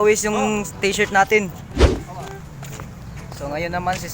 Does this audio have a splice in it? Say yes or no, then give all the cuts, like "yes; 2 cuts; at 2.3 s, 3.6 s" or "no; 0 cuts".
yes; 1 cut; at 1.8 s